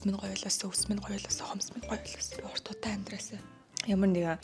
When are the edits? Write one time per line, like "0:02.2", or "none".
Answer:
none